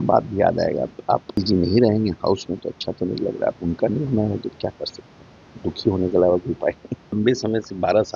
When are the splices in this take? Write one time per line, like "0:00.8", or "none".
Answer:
0:01.4
0:07.2

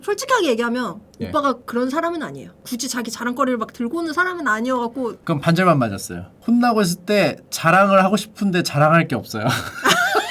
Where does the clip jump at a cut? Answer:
0:02.6
0:05.2

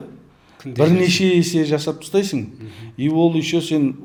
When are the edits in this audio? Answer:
none

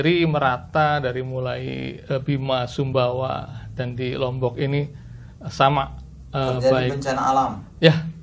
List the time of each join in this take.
none

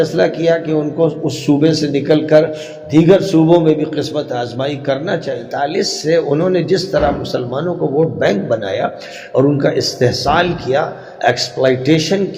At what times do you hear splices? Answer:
0:05.4

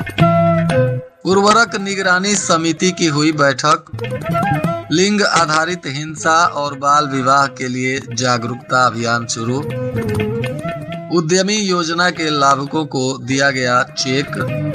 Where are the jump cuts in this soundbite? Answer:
0:01.1

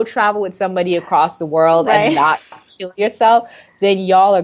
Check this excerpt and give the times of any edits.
none

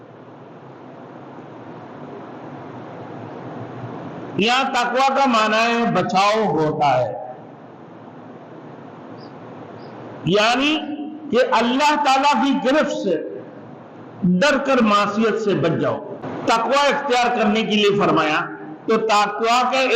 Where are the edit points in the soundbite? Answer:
0:16.1

